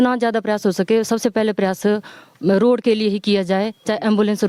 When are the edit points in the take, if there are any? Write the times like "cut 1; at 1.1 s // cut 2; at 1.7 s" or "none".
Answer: none